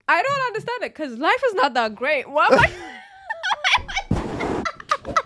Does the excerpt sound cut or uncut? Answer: uncut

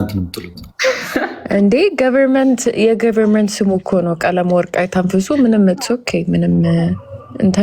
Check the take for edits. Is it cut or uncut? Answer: uncut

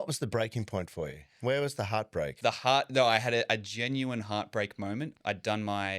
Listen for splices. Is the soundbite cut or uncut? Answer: cut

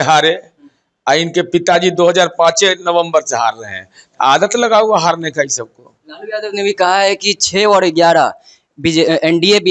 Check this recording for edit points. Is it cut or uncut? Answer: uncut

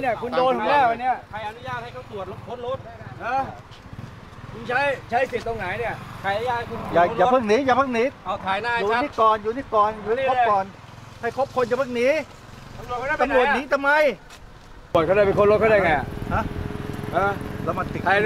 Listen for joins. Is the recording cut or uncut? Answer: cut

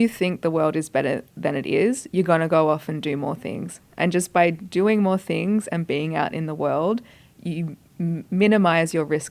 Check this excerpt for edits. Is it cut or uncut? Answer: uncut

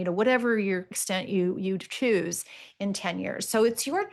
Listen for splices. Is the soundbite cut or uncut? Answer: uncut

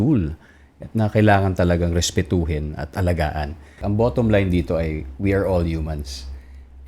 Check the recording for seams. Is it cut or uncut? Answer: cut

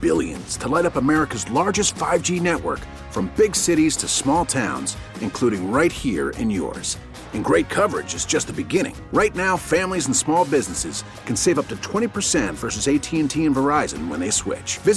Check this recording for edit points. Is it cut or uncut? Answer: uncut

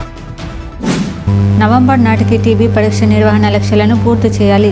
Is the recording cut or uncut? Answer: cut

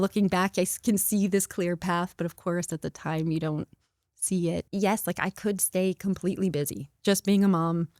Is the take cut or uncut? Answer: cut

